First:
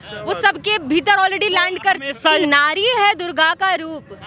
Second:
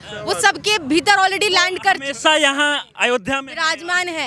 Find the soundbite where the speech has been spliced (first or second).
first